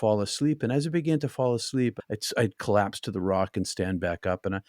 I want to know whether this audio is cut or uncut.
cut